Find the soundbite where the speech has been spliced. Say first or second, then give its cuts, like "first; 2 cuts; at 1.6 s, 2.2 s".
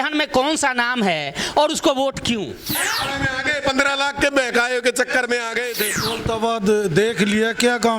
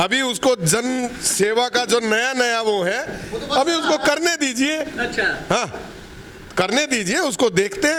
first; 2 cuts; at 2.8 s, 5.9 s